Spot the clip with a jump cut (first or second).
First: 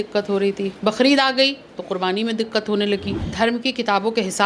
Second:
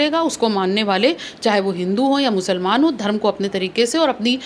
first